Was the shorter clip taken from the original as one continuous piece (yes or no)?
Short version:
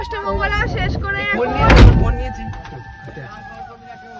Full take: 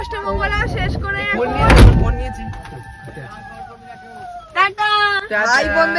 yes